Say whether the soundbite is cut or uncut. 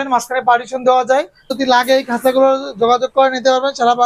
cut